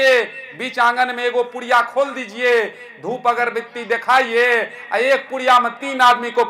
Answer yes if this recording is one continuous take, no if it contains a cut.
yes